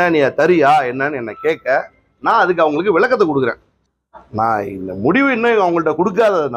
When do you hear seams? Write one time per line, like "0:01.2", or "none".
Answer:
0:03.7